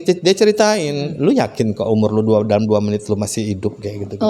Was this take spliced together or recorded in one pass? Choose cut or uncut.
uncut